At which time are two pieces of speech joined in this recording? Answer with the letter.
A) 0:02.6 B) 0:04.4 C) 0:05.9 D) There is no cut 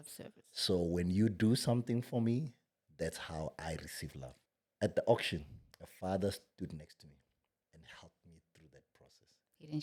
B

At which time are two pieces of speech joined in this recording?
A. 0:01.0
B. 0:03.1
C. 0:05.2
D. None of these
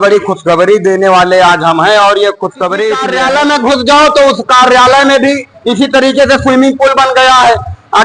B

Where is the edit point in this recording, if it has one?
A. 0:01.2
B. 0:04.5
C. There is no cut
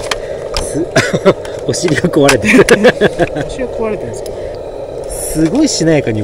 B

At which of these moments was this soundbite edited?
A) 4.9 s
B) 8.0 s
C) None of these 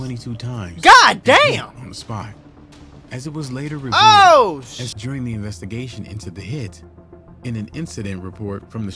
A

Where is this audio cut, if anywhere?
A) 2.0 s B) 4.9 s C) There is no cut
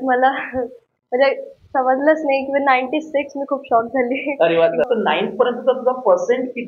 B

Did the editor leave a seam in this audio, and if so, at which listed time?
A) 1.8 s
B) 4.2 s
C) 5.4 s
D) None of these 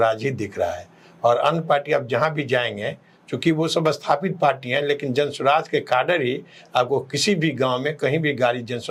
D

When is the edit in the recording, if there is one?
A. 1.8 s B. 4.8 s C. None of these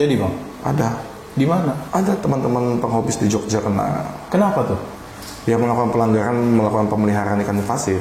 A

